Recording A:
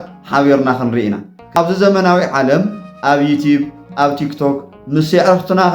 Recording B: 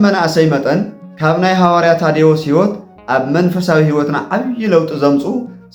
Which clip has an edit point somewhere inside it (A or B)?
A